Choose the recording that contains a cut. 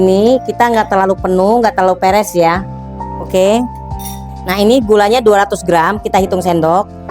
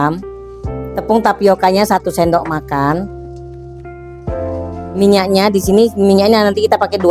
second; 2 cuts; at 3.1 s, 4.9 s

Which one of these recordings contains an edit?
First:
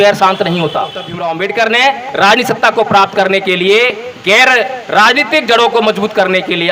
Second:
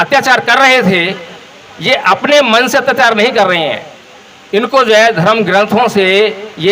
first; 1 cut; at 1.1 s

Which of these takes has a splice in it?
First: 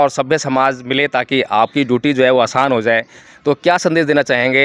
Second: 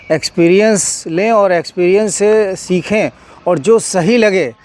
first; 1 cut; at 3.2 s

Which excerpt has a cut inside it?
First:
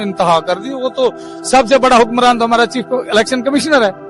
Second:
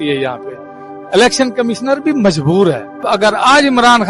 second; 1 cut; at 3.0 s

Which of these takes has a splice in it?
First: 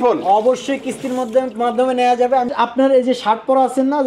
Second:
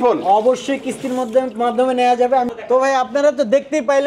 first; 1 cut; at 2.5 s

